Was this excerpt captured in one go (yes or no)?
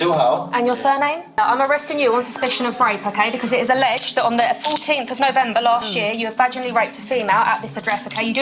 no